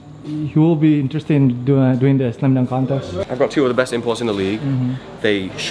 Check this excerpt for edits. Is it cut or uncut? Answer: cut